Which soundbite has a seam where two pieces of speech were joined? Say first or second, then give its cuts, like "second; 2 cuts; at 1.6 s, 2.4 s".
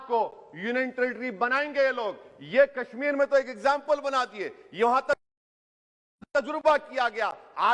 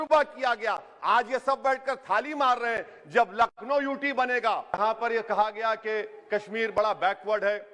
second; 1 cut; at 4.8 s